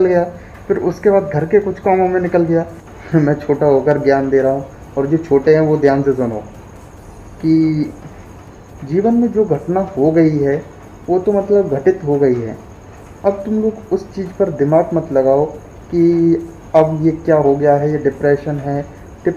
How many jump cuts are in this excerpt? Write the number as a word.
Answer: one